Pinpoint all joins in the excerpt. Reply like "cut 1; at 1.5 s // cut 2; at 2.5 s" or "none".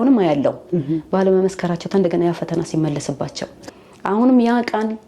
cut 1; at 3.6 s